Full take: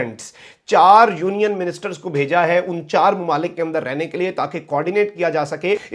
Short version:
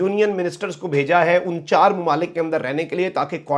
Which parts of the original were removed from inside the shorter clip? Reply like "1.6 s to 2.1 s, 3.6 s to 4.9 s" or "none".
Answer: none